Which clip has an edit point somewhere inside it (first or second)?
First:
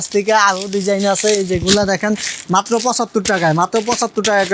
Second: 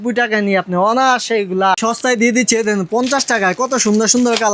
second